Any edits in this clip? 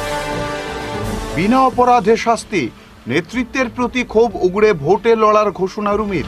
yes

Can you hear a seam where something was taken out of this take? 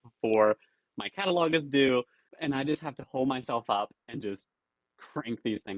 yes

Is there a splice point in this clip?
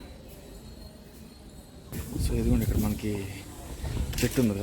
yes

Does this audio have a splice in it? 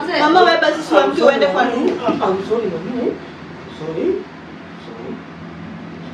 no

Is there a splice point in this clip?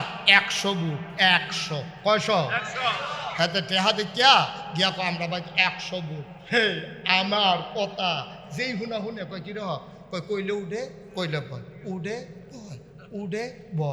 no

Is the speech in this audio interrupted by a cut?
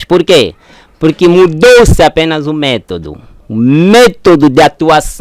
no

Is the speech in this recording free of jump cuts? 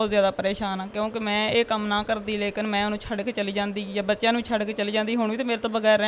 yes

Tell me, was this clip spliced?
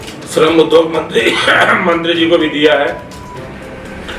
no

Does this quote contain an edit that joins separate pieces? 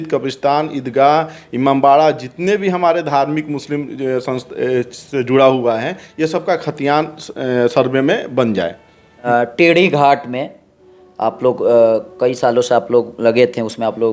yes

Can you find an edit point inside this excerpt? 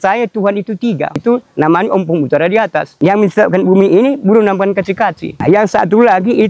yes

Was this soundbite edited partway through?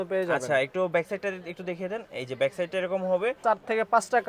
yes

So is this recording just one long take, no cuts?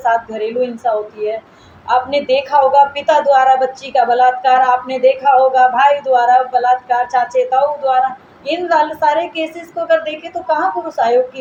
yes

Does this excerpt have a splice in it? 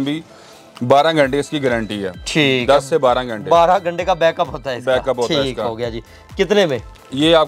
no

